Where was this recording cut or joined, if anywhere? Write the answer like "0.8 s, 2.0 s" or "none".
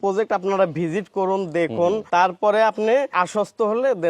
2.0 s, 3.1 s